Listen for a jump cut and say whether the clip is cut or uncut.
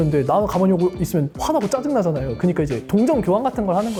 uncut